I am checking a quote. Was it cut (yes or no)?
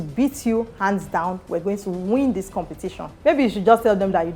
yes